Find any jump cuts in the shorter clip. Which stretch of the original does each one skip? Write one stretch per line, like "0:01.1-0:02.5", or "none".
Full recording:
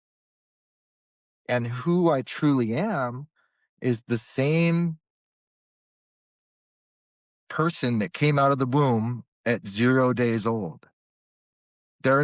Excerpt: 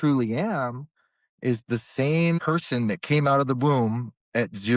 0:04.8-0:07.5